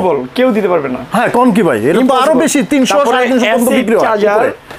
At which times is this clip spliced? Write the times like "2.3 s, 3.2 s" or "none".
none